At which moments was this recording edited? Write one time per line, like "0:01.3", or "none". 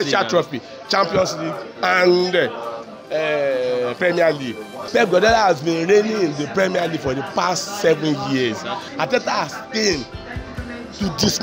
0:04.8
0:08.9